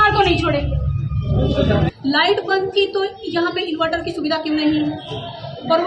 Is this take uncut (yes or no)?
no